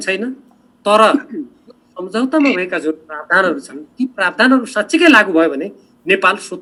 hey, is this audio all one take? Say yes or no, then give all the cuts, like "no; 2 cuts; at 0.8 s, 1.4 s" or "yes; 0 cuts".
yes; 0 cuts